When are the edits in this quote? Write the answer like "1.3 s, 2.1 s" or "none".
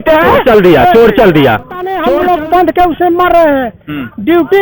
1.8 s